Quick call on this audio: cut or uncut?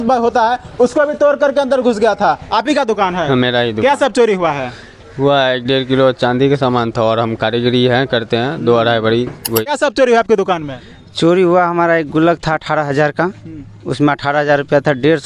cut